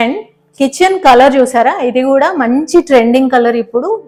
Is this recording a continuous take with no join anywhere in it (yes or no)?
yes